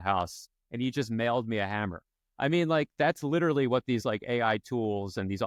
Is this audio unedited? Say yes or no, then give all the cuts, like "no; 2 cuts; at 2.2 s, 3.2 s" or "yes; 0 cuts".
yes; 0 cuts